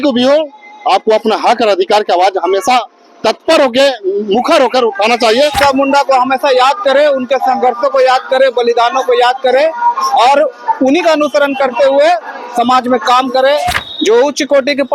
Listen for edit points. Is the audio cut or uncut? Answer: cut